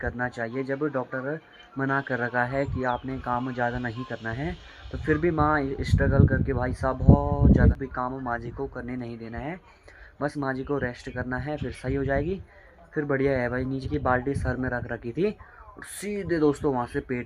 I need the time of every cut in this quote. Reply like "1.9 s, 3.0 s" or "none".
7.8 s, 13.8 s